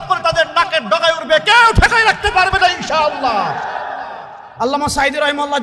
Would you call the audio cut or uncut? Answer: cut